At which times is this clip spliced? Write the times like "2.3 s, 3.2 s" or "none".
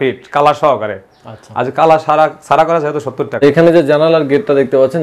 3.4 s